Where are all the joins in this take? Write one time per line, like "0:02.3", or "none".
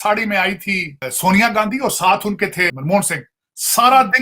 0:01.1
0:02.7